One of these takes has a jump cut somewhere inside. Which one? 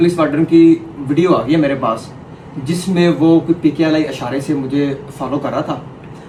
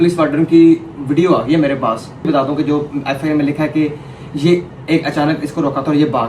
second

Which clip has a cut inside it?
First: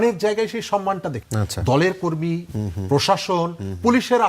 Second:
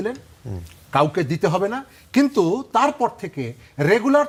first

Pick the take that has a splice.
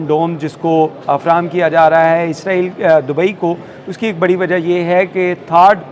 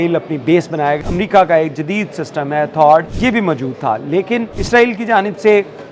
second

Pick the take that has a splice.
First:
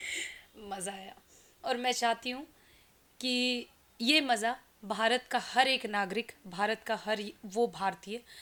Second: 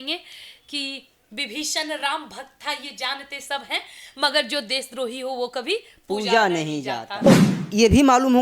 second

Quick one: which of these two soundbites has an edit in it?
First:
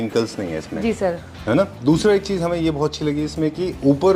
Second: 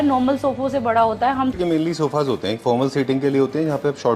second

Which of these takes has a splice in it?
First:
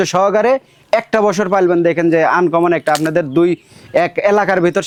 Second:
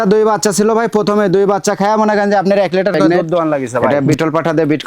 second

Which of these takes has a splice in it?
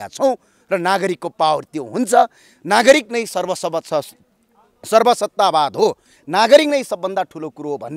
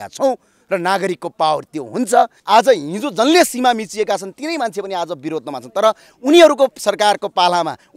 second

